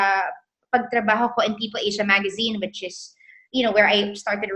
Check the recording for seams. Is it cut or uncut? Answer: uncut